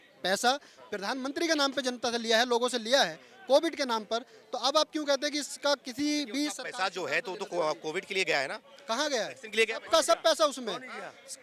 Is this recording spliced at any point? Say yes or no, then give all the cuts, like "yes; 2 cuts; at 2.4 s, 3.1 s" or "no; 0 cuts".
no; 0 cuts